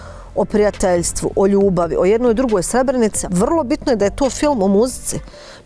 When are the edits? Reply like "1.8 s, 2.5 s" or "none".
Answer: 3.2 s